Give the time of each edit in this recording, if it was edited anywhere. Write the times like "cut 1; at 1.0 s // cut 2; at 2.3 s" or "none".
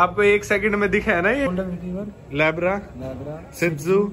cut 1; at 1.5 s

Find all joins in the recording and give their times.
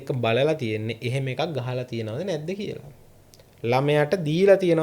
none

